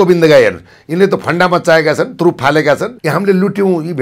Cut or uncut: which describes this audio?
cut